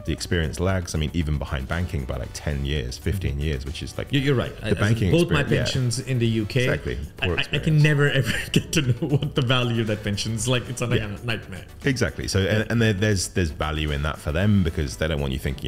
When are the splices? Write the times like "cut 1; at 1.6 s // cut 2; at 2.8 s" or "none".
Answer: none

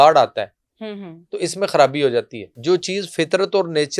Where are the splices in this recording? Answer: cut 1; at 2.5 s

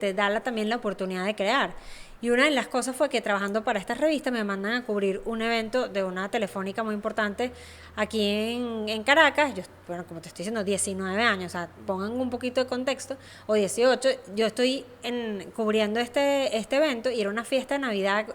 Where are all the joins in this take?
none

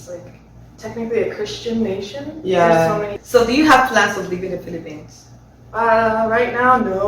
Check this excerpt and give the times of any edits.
cut 1; at 3.2 s

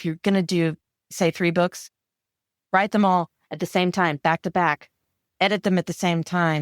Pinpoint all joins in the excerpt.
cut 1; at 1.1 s

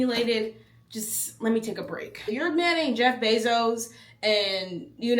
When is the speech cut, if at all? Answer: cut 1; at 2.3 s

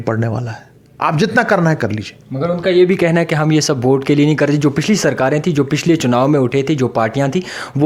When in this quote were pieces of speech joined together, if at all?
none

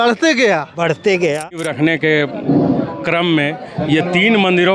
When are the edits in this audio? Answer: cut 1; at 1.7 s

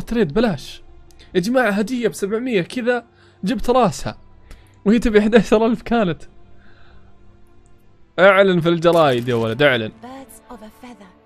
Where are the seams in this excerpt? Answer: none

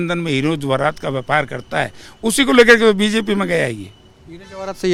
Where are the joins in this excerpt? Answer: none

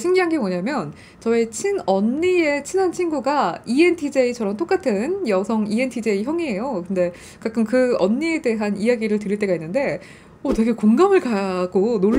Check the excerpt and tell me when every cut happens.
none

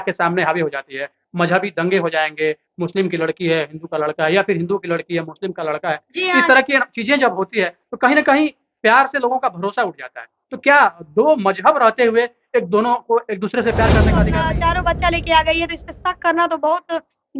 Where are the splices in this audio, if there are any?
cut 1; at 14.3 s

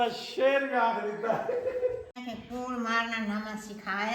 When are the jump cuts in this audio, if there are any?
cut 1; at 2.2 s

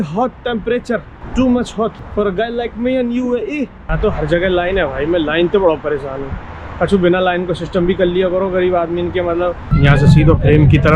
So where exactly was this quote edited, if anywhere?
cut 1; at 1.2 s // cut 2; at 2.0 s // cut 3; at 3.9 s // cut 4; at 9.7 s

